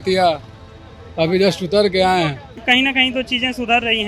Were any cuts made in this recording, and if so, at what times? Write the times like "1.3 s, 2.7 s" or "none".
2.6 s